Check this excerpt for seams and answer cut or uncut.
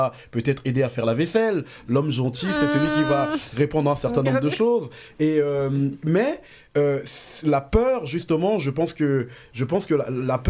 uncut